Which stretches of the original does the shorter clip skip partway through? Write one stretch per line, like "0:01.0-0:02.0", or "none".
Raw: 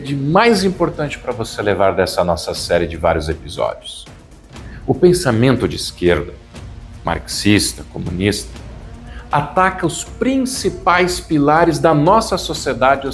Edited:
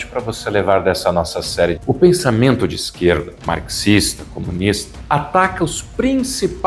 0:02.9-0:04.8
0:06.3-0:06.9
0:08.5-0:09.1

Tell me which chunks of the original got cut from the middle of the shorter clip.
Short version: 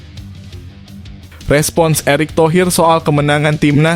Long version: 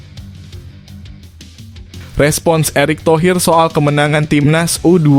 0:01.4-0:02.1

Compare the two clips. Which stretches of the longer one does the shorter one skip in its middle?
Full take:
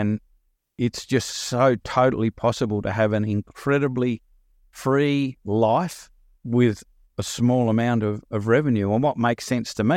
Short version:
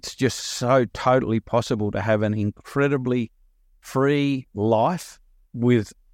none

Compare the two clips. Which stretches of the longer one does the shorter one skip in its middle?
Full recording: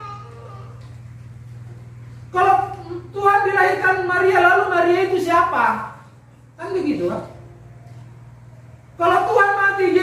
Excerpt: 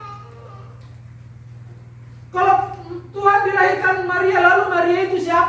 none

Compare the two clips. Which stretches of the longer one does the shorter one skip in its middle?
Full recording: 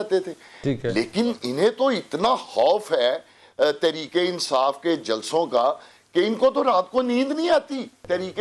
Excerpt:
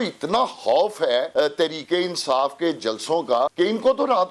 0:03.2-0:03.5
0:05.8-0:06.1

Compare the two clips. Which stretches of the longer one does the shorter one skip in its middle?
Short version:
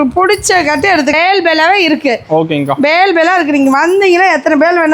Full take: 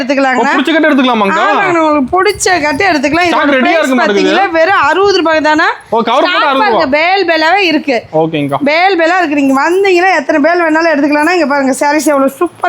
0:03.1-0:07.0

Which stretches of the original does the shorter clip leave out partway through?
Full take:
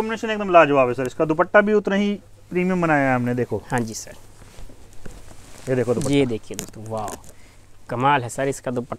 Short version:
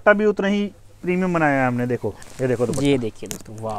0:03.6-0:05.4

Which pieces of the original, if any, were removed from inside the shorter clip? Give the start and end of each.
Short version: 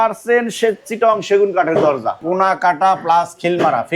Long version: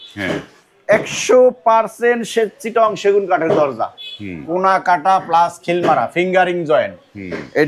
0:03.9-0:04.4

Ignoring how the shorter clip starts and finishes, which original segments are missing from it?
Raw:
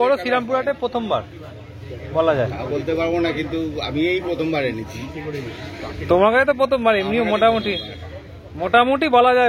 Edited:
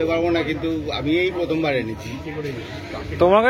none

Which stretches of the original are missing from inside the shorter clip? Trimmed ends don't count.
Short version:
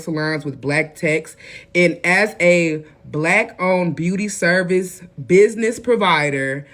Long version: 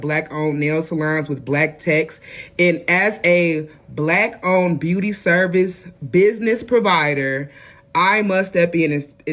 none

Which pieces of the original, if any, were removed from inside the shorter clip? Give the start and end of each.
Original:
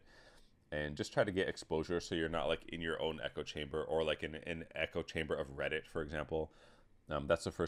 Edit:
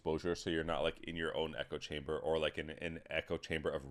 none

